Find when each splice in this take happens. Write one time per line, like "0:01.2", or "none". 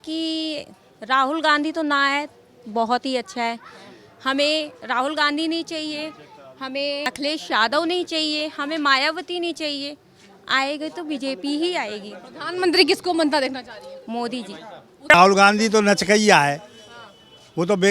0:15.1